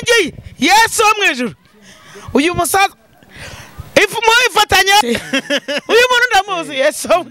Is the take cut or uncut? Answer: cut